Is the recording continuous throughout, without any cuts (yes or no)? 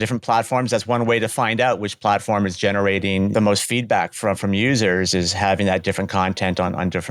no